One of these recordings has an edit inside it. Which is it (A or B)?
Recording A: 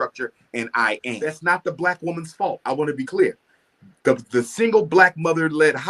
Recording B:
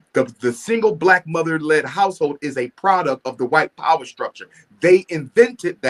A